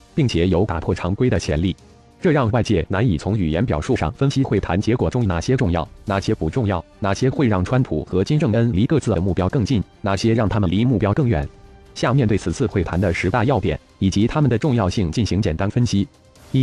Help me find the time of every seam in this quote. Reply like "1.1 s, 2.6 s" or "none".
11.3 s